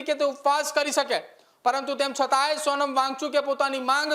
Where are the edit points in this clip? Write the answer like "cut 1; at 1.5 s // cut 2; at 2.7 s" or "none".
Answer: none